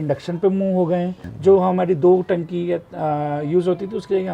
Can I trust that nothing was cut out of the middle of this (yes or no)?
no